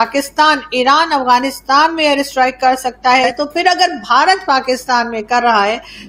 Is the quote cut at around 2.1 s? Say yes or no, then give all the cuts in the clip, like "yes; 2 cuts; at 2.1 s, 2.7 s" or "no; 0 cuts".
no; 1 cut; at 3.3 s